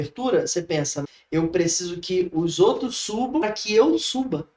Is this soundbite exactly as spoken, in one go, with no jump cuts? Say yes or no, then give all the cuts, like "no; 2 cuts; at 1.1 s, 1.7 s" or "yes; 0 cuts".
no; 1 cut; at 3.4 s